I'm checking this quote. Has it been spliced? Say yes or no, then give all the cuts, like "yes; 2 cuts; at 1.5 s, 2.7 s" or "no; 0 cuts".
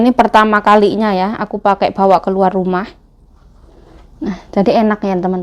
no; 0 cuts